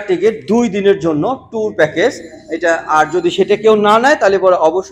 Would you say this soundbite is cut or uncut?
uncut